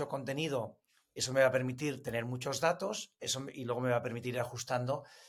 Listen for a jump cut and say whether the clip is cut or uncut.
uncut